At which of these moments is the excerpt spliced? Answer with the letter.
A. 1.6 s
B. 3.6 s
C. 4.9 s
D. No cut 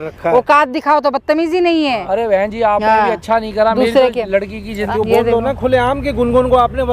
C